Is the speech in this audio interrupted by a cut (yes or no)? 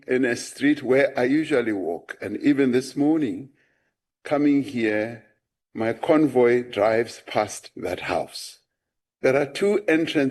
no